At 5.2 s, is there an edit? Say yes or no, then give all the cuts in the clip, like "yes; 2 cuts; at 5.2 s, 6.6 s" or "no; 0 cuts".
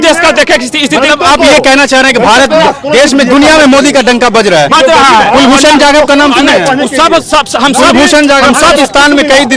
no; 0 cuts